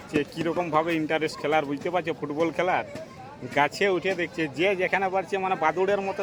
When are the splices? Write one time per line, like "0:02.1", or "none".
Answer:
none